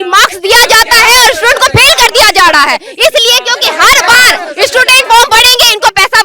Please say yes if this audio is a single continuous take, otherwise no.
yes